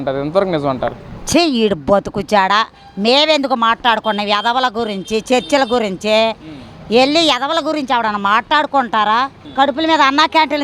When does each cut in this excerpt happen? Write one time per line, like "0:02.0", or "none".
0:09.4